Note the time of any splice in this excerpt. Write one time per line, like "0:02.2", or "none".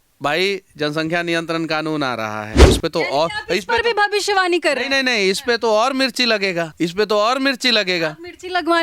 0:02.6
0:06.7